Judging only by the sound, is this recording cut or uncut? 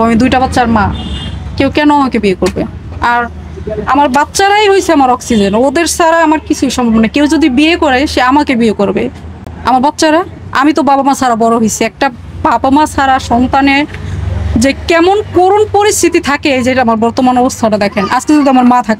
uncut